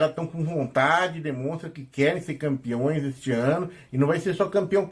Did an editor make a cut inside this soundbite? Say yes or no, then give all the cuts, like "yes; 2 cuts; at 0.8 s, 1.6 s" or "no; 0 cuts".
no; 0 cuts